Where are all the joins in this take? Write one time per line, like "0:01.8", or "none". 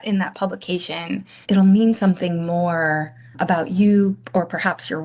0:01.3
0:03.3

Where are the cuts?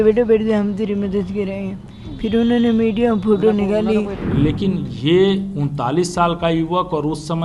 0:04.2

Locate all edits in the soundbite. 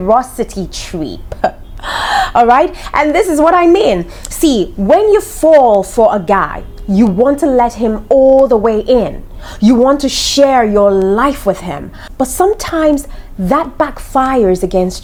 none

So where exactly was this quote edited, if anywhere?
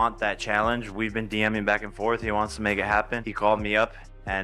0:03.2

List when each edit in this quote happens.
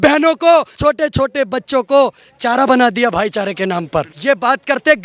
0:00.8
0:04.1

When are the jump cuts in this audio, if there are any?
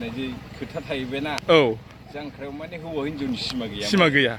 none

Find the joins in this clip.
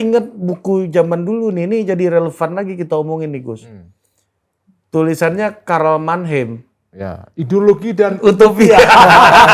none

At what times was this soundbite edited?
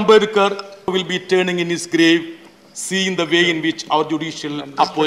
0:00.9

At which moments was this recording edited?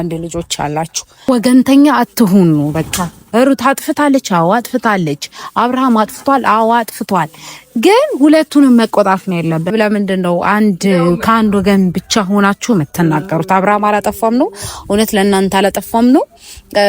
0:01.3
0:09.7

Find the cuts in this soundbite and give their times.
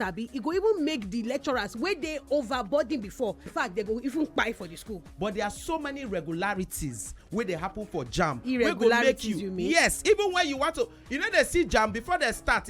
0:03.5
0:04.9

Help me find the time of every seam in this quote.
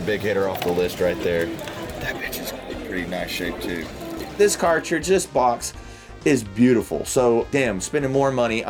none

